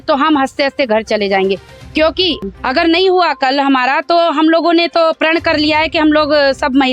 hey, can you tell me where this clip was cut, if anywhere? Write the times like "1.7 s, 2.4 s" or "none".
2.4 s